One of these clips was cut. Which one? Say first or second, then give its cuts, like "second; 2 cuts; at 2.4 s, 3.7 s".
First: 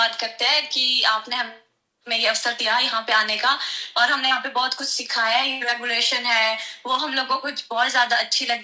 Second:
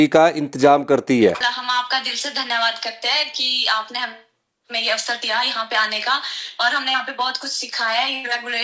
second; 1 cut; at 1.4 s